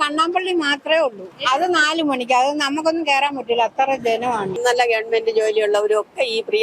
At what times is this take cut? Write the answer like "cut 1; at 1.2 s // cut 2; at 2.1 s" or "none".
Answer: cut 1; at 1.3 s // cut 2; at 4.6 s